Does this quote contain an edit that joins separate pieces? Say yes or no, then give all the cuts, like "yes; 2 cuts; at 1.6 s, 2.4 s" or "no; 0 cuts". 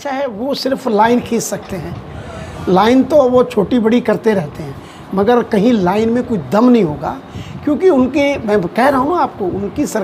no; 0 cuts